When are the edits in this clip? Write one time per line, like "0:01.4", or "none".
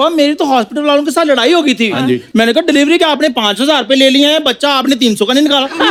none

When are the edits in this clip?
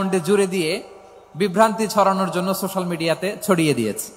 none

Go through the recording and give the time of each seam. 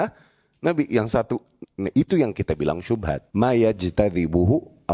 0:03.2

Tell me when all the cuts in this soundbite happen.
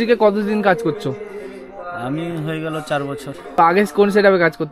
0:03.6

